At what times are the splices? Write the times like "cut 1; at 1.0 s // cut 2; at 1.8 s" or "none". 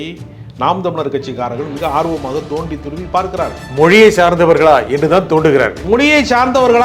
cut 1; at 5.8 s